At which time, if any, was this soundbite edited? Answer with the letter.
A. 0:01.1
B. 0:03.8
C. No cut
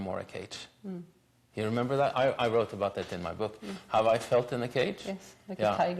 C